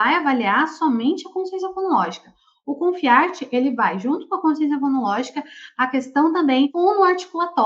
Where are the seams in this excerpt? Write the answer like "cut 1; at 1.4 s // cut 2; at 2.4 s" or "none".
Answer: cut 1; at 6.7 s

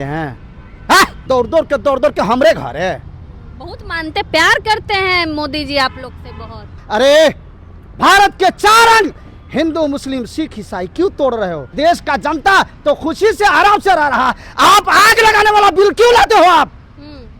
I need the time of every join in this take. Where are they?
cut 1; at 1.2 s // cut 2; at 6.8 s // cut 3; at 11.7 s

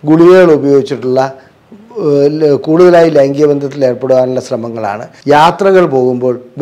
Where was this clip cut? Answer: cut 1; at 5.1 s

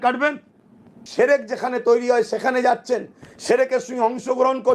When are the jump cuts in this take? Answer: cut 1; at 1.0 s

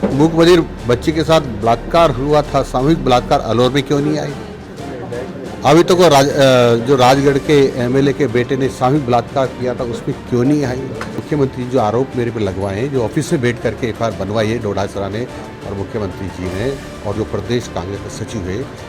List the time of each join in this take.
cut 1; at 11.2 s

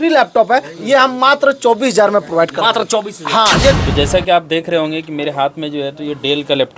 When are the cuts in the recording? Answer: cut 1; at 3.8 s

